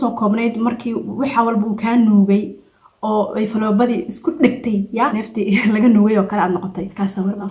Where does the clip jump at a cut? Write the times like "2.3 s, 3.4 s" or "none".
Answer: none